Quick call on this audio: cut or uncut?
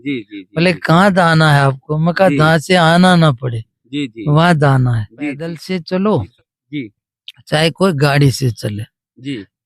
cut